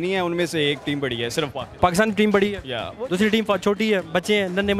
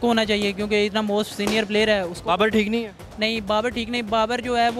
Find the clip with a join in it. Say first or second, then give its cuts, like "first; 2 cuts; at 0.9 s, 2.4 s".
first; 1 cut; at 1.6 s